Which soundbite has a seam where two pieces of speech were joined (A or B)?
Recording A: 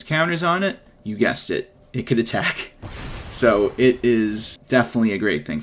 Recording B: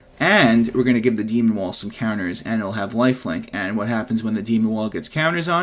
A